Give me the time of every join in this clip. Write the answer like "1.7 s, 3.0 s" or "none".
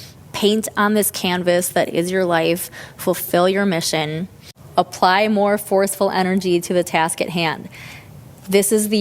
4.5 s